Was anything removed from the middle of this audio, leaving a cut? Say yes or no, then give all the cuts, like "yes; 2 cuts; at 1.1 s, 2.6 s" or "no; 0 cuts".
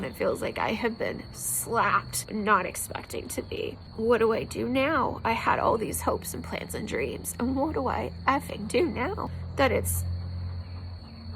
yes; 3 cuts; at 2.2 s, 3.8 s, 9.4 s